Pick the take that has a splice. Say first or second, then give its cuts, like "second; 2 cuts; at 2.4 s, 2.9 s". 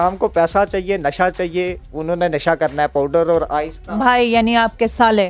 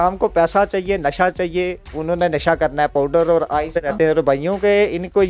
second; 1 cut; at 3.8 s